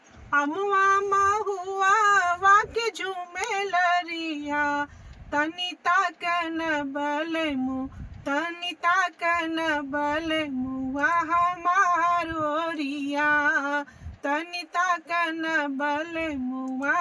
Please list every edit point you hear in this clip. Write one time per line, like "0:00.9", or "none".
none